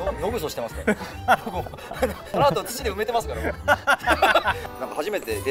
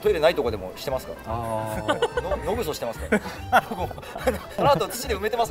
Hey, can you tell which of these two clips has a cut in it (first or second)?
first